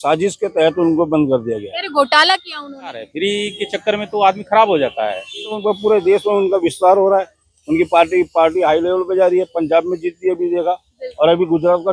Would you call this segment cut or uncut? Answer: cut